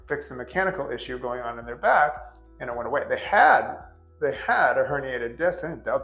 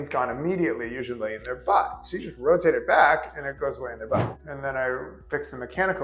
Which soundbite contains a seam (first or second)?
second